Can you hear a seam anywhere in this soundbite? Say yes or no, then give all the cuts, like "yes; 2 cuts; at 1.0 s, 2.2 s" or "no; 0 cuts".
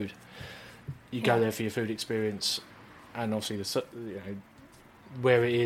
no; 0 cuts